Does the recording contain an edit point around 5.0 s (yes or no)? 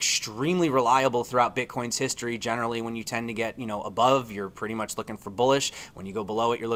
no